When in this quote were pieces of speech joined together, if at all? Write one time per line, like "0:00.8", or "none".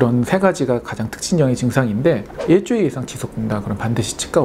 0:02.3